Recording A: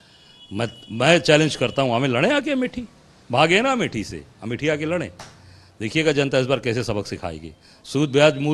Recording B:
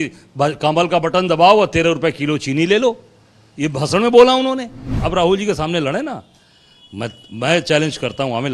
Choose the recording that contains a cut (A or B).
B